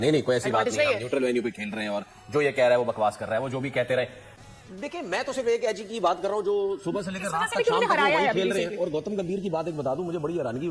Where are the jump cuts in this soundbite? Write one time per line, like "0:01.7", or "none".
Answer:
0:04.2